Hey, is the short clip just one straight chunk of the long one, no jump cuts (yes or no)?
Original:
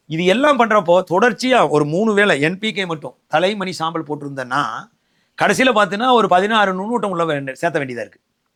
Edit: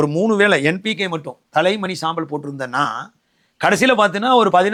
yes